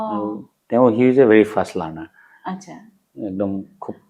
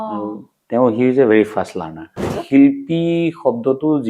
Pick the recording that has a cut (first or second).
second